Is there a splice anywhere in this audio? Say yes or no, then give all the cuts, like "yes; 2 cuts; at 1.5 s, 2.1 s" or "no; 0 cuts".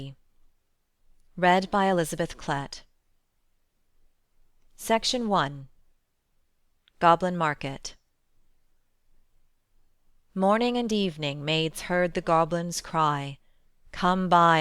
no; 0 cuts